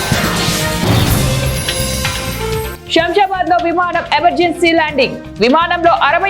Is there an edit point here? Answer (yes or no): yes